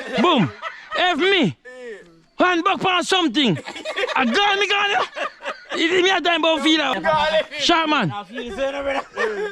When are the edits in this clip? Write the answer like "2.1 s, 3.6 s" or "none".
6.9 s

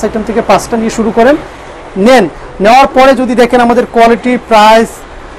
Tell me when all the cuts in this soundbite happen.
none

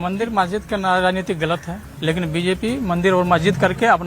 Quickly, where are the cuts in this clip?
1.8 s

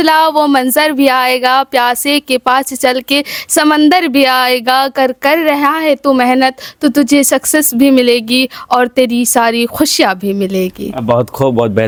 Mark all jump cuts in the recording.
none

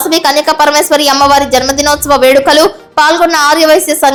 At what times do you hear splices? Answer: none

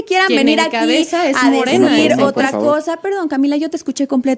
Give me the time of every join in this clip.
none

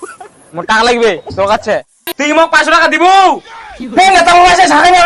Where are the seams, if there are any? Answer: 2.0 s

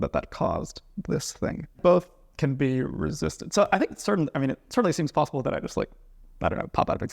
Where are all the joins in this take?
1.8 s

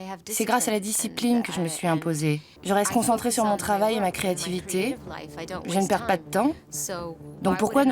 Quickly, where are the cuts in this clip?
2.5 s

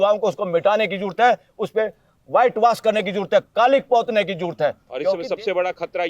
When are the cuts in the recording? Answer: 5.2 s

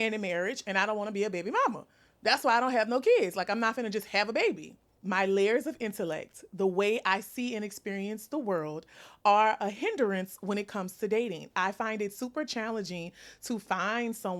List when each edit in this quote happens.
4.8 s

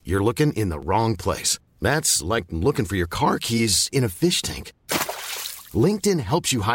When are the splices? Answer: none

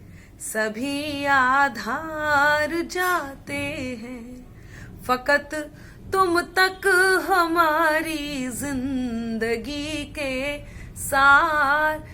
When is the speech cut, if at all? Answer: none

